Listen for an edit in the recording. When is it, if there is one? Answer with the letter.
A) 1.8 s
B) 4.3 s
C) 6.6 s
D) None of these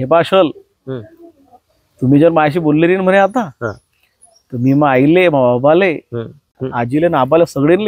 C